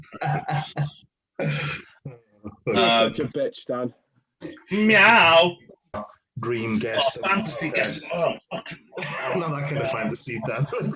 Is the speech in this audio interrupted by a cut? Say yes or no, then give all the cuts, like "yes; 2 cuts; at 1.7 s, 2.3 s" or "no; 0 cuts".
yes; 1 cut; at 5.9 s